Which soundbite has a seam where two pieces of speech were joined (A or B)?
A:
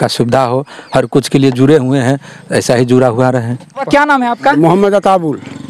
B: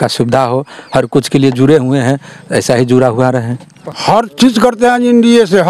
B